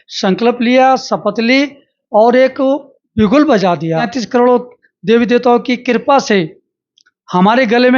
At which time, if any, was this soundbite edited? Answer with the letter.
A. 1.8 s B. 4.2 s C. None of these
B